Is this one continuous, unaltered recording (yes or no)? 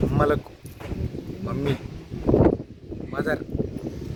yes